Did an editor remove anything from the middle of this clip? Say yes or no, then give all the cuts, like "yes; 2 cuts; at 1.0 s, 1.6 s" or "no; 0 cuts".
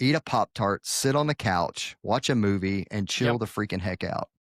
no; 0 cuts